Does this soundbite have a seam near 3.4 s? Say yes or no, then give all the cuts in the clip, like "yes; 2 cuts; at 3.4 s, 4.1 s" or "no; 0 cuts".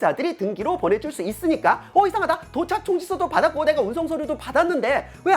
no; 1 cut; at 1.8 s